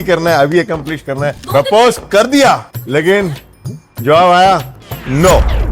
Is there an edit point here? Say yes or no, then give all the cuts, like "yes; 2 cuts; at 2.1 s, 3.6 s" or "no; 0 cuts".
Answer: yes; 2 cuts; at 1.4 s, 2.7 s